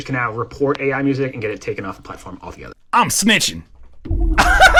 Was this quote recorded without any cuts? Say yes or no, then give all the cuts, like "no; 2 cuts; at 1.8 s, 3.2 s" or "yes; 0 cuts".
yes; 0 cuts